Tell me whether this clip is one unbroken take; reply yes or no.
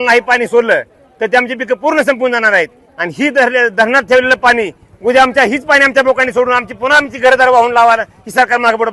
yes